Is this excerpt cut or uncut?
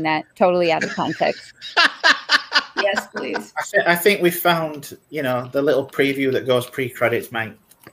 uncut